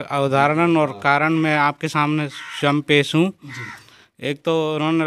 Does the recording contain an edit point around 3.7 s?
no; 0 cuts

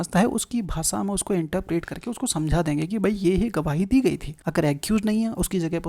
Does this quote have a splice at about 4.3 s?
yes; 1 cut; at 4.3 s

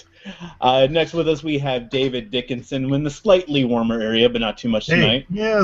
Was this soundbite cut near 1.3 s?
yes; 1 cut; at 1.3 s

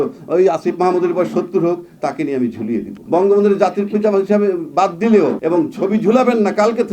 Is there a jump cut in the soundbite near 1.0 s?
no; 2 cuts; at 3.0 s, 5.4 s

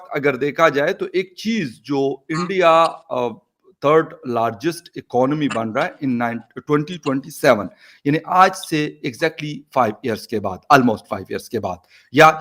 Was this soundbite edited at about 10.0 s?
no; 0 cuts

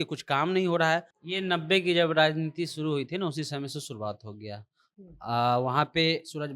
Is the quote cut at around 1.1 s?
yes; 1 cut; at 1.1 s

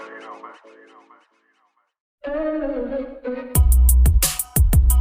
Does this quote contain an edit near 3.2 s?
no; 1 cut; at 1.9 s

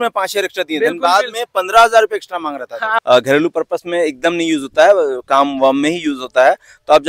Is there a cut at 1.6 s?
no; 1 cut; at 2.9 s

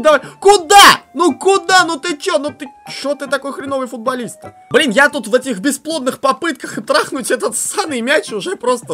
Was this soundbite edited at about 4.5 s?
yes; 1 cut; at 4.5 s

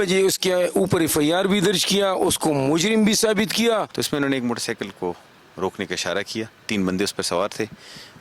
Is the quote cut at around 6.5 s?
no; 1 cut; at 3.9 s

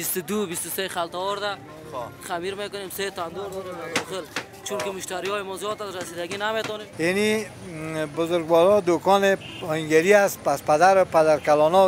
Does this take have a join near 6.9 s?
yes; 1 cut; at 6.9 s

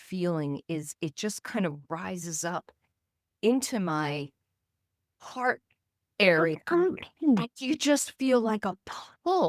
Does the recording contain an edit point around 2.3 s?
no; 0 cuts

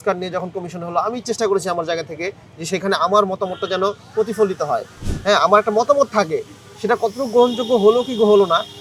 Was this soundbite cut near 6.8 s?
no; 0 cuts

